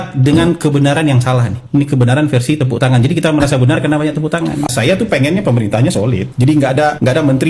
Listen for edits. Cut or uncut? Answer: uncut